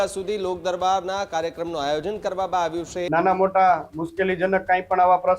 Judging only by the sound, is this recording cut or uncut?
cut